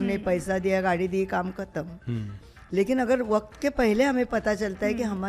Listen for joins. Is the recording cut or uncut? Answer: uncut